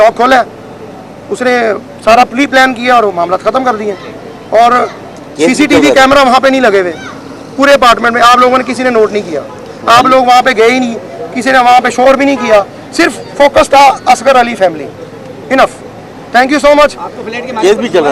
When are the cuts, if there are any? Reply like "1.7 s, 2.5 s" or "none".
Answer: none